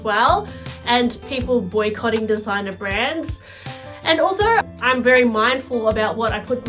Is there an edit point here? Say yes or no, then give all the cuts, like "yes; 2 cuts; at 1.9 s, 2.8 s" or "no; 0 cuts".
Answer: yes; 1 cut; at 4.7 s